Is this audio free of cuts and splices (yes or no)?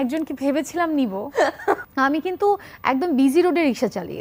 no